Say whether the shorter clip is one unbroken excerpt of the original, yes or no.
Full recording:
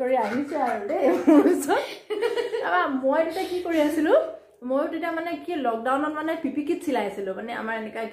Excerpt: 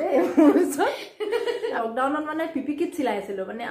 no